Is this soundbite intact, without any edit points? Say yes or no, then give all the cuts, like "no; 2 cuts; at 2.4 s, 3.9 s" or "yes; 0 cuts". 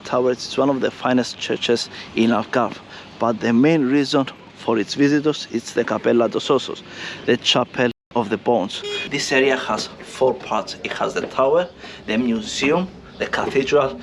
no; 1 cut; at 9.0 s